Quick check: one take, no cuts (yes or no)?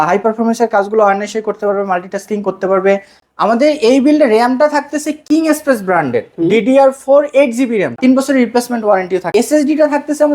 no